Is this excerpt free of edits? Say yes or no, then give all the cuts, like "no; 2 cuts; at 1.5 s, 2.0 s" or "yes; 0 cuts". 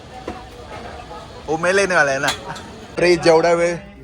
no; 1 cut; at 2.8 s